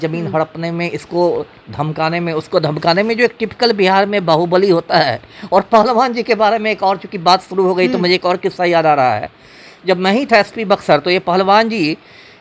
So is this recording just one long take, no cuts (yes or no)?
yes